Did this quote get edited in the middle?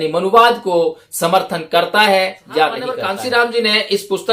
yes; 1 cut; at 3.1 s

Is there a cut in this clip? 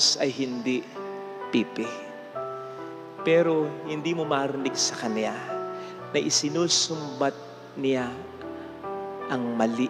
no; 0 cuts

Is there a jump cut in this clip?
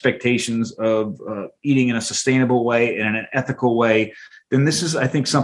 no; 0 cuts

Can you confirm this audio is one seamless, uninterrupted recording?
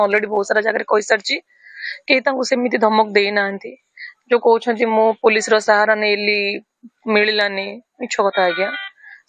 yes; 0 cuts

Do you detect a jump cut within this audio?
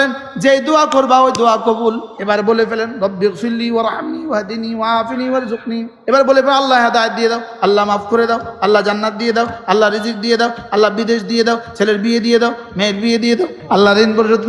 yes; 3 cuts; at 2.1 s, 5.9 s, 13.6 s

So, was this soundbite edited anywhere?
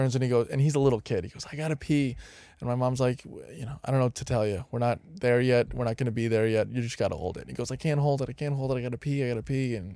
no; 0 cuts

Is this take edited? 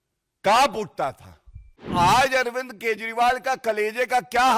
yes; 1 cut; at 1.9 s

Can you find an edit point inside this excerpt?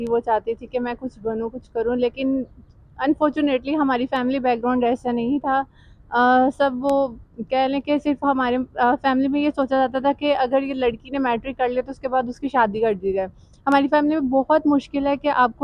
no; 0 cuts

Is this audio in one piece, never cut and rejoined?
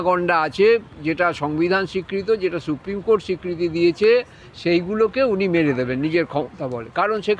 yes; 0 cuts

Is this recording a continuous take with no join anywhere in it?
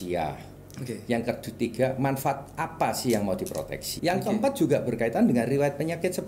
no; 1 cut; at 3.9 s

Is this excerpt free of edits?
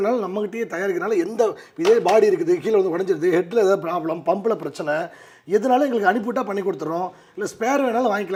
yes; 0 cuts

